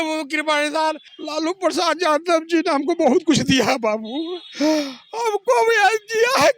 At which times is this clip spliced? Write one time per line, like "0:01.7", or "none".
0:01.1